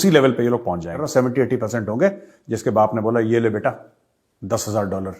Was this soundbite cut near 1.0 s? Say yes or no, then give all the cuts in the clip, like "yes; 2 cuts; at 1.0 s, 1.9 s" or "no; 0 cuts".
yes; 1 cut; at 1.0 s